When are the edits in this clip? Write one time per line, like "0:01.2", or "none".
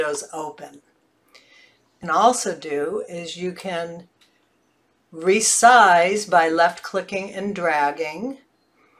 0:01.9